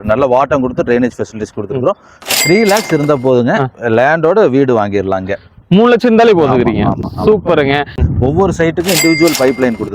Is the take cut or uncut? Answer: cut